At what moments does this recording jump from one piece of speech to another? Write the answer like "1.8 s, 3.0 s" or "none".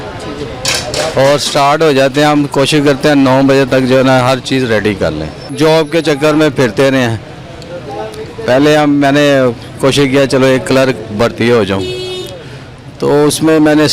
5.4 s